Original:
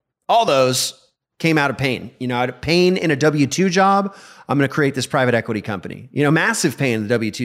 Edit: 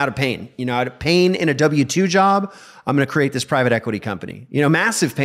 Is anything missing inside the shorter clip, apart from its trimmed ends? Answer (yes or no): no